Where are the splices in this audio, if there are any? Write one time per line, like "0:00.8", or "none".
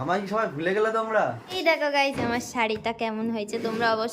0:01.6